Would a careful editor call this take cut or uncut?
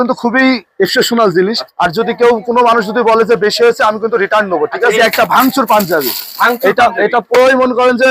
cut